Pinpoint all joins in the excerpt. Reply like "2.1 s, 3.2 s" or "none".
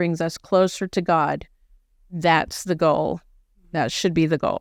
none

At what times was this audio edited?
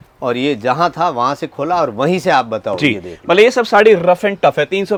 none

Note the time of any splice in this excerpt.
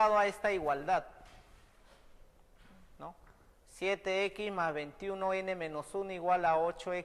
none

